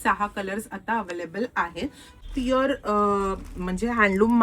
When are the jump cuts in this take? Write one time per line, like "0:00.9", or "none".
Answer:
0:02.2

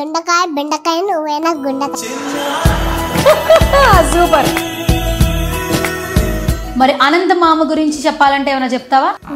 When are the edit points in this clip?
none

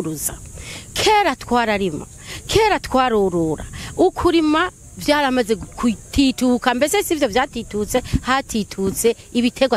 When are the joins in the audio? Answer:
none

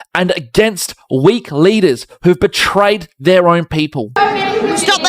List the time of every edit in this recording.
0:04.2

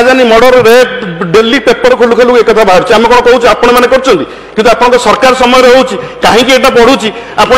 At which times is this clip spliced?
none

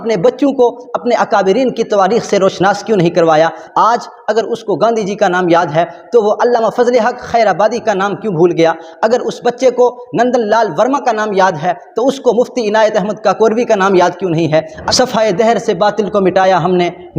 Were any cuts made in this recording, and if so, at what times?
0:03.6
0:14.8

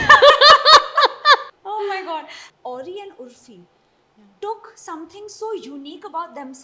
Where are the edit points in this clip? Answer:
0:01.5
0:02.4

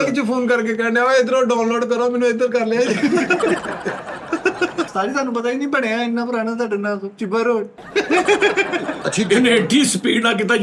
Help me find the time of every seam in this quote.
0:04.9
0:09.0

